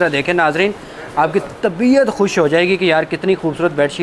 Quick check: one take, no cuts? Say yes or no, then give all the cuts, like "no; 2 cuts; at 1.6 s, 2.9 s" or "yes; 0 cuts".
yes; 0 cuts